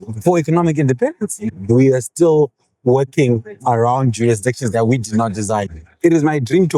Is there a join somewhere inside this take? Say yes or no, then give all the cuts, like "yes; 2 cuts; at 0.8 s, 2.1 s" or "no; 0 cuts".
yes; 2 cuts; at 1.5 s, 5.8 s